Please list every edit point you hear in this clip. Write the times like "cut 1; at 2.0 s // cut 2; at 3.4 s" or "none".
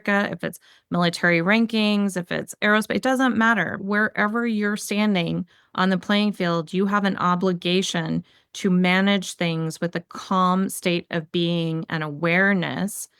cut 1; at 3.7 s

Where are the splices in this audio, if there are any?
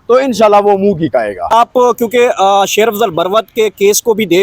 cut 1; at 1.5 s

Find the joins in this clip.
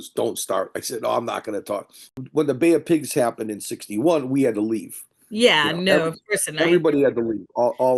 cut 1; at 2.1 s

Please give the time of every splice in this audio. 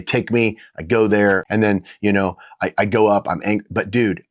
cut 1; at 1.4 s

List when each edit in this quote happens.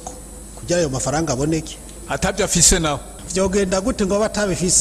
cut 1; at 3.2 s

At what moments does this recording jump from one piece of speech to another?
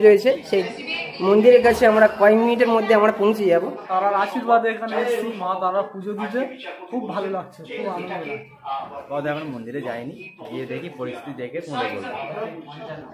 cut 1; at 3.9 s // cut 2; at 9.0 s

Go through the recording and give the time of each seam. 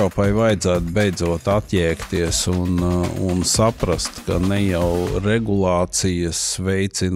none

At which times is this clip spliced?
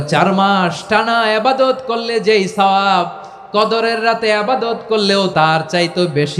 cut 1; at 5.3 s

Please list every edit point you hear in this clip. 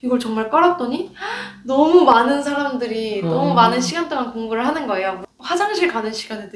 cut 1; at 5.2 s

